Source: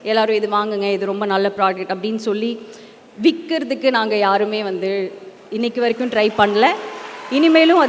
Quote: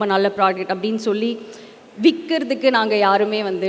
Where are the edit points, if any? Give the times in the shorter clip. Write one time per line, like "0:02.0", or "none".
none